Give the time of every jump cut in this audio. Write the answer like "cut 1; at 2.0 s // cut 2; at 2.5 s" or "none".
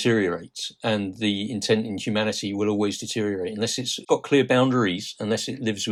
none